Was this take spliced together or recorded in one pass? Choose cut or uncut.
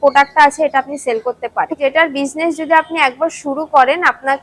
cut